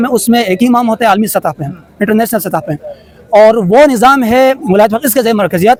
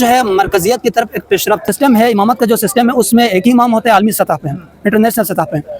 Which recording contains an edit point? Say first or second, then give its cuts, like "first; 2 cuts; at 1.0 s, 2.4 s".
second; 1 cut; at 1.6 s